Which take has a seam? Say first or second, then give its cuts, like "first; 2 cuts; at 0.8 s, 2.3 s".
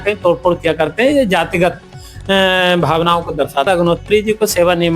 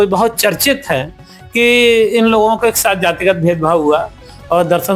first; 1 cut; at 3.7 s